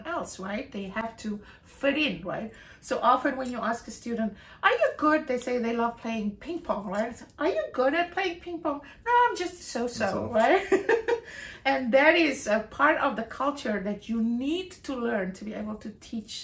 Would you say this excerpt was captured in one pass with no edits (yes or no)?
yes